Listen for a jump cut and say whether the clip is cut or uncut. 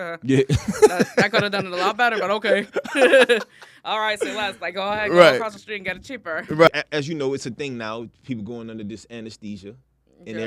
cut